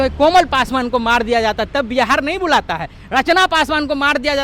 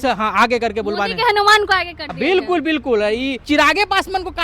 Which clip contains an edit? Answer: second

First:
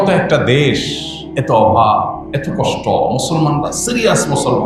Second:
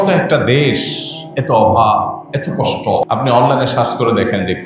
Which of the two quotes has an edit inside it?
second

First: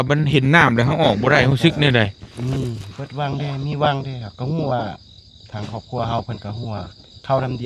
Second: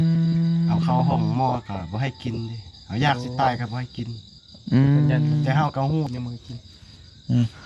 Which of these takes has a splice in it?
second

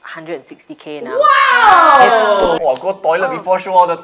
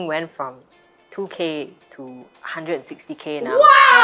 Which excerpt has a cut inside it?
first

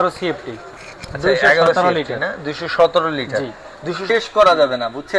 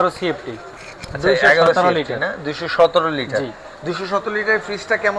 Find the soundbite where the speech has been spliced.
first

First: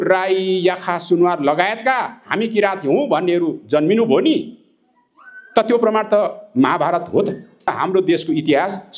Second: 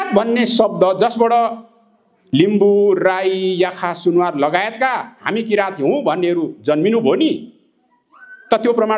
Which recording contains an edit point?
first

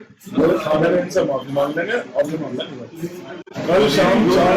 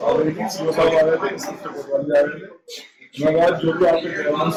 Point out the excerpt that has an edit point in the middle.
first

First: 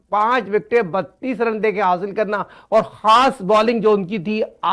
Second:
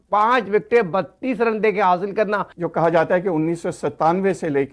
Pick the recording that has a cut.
second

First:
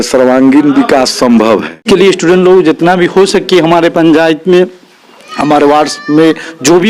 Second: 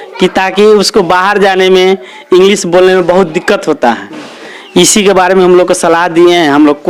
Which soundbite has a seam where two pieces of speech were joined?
first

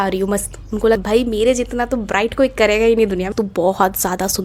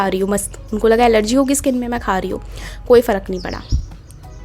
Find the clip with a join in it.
first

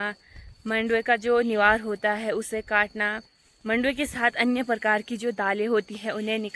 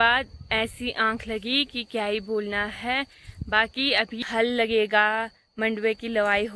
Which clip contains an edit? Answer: second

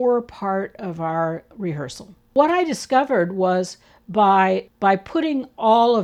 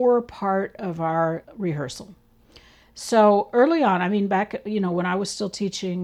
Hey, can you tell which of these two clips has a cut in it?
first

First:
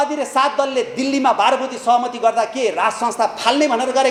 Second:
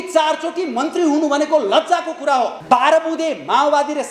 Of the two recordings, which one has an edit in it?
second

